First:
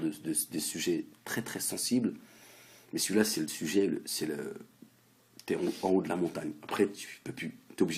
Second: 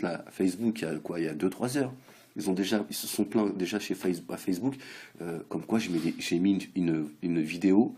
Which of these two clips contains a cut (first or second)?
second